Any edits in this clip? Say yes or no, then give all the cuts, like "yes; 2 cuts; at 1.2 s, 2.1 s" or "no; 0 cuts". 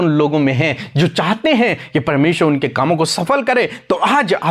no; 0 cuts